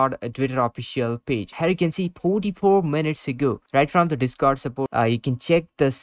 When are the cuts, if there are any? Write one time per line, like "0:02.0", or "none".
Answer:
0:01.5
0:04.9